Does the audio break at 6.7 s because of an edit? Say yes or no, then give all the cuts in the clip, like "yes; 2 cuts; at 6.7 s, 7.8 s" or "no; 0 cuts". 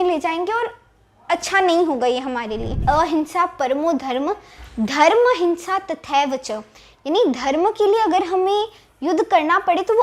no; 1 cut; at 2.8 s